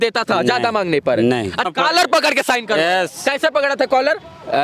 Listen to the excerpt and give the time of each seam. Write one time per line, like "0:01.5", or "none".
0:01.7